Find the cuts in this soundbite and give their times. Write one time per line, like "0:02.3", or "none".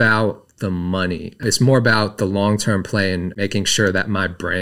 0:01.4
0:03.3